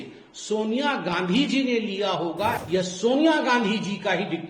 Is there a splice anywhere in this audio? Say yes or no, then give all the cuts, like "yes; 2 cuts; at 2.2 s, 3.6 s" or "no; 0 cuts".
yes; 1 cut; at 2.6 s